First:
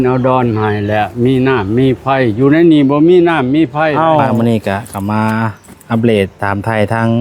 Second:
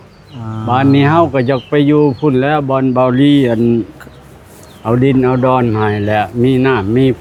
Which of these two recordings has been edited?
first; 1 cut; at 4.3 s

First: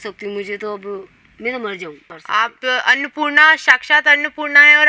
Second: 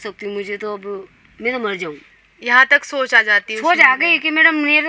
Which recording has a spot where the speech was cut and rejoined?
first; 1 cut; at 2.1 s

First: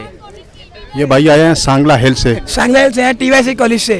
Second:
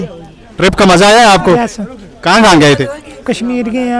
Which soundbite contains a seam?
first; 1 cut; at 2.5 s

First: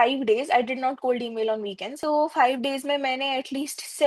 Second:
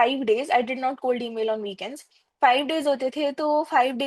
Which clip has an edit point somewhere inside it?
first; 1 cut; at 2.0 s

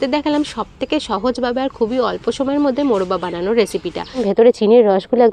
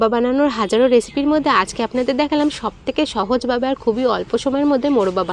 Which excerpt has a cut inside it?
first; 1 cut; at 4.2 s

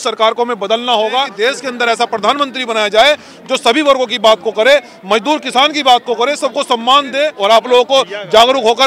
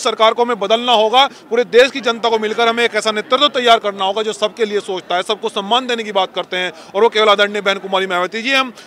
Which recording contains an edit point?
first; 2 cuts; at 1.3 s, 7.3 s

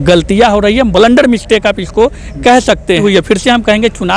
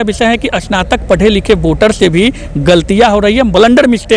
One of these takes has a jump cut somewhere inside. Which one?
first; 1 cut; at 3.0 s

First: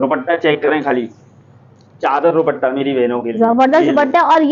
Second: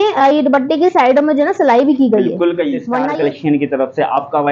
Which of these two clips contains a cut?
second; 1 cut; at 2.9 s

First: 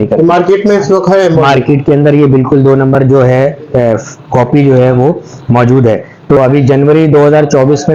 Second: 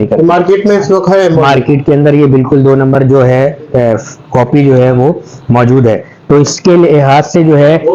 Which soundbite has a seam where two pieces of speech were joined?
first; 1 cut; at 6.4 s

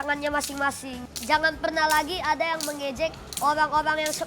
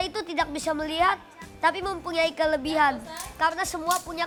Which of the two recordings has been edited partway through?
first; 1 cut; at 3.2 s

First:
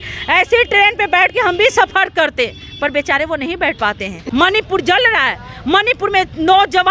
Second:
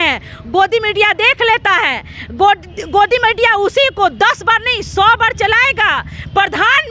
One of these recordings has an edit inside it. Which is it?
first; 1 cut; at 4.1 s

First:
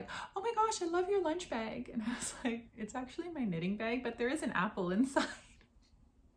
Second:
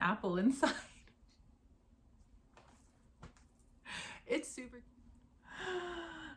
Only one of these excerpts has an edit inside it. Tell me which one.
second; 1 cut; at 4.5 s

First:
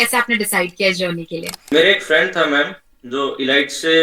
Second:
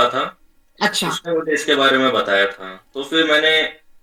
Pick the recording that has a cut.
first; 1 cut; at 1.7 s

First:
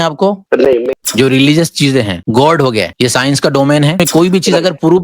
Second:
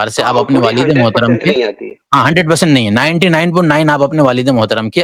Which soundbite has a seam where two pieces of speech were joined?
first; 4 cuts; at 1.0 s, 2.2 s, 2.9 s, 3.9 s

